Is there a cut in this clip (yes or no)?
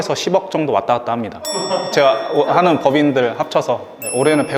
yes